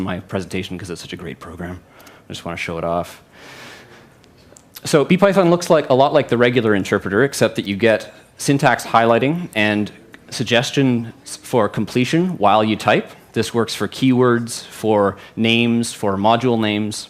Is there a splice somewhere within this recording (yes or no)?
yes